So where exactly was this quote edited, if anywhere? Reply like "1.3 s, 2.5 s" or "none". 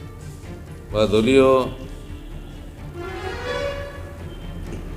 0.9 s